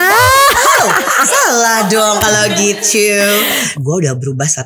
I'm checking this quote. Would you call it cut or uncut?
cut